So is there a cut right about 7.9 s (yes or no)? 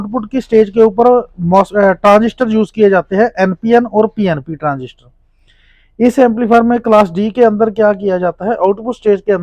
no